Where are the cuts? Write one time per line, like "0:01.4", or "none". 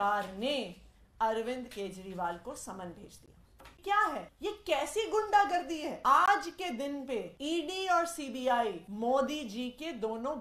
0:03.8
0:04.3
0:05.9
0:07.3
0:08.9

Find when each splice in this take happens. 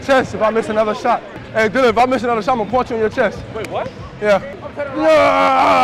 0:01.4
0:04.6

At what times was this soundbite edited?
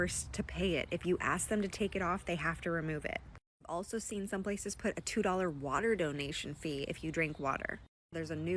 none

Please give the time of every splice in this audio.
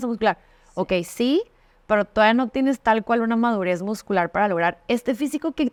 none

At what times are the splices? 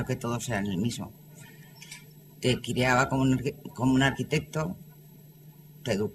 0:03.6

